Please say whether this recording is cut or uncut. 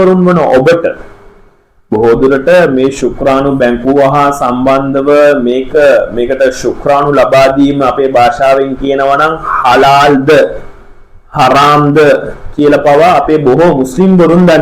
uncut